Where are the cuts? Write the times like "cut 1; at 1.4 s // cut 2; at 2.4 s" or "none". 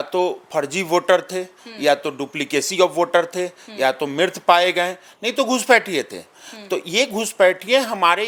none

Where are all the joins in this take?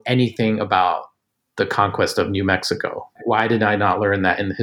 cut 1; at 3.0 s

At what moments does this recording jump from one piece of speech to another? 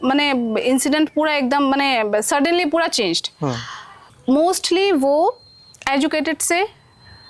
cut 1; at 4.1 s

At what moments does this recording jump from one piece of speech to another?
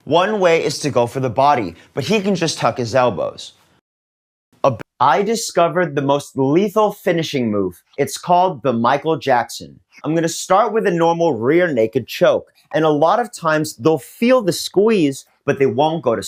none

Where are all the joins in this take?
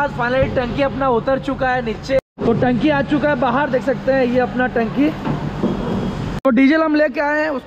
cut 1; at 2.2 s // cut 2; at 6.3 s

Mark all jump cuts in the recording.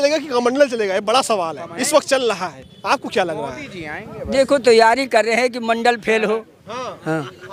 none

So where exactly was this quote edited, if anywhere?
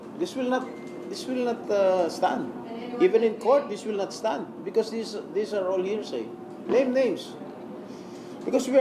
cut 1; at 6.5 s

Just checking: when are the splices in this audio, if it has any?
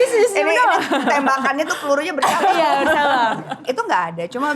cut 1; at 3.6 s

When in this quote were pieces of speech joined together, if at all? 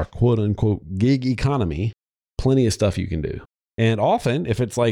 cut 1; at 3.4 s

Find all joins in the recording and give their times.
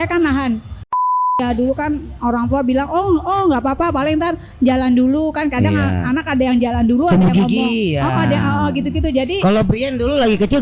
cut 1; at 1.1 s

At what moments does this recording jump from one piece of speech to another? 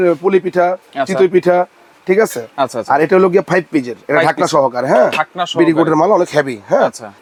none

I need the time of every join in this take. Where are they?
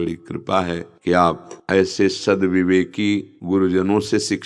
cut 1; at 0.9 s // cut 2; at 1.5 s // cut 3; at 3.3 s

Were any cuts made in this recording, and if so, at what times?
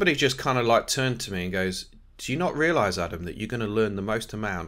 none

